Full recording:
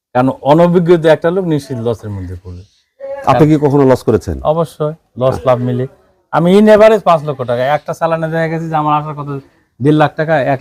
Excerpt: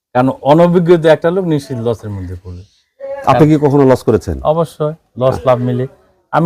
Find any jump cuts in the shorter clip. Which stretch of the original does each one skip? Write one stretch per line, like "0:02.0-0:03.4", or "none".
none